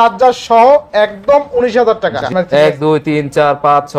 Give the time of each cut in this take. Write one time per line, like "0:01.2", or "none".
0:02.3